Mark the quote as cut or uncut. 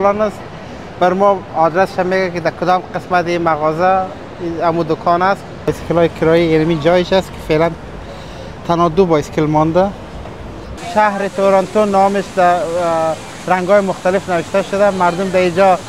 cut